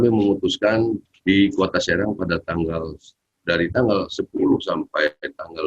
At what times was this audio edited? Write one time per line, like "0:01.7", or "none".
0:01.1